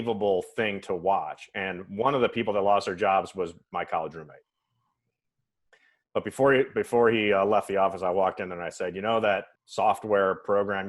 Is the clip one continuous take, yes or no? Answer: no